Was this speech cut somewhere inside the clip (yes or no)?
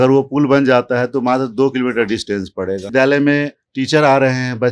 yes